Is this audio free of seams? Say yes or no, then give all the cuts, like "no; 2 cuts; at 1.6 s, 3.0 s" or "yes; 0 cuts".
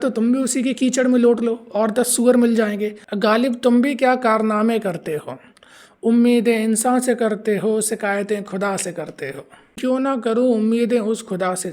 no; 2 cuts; at 3.1 s, 9.8 s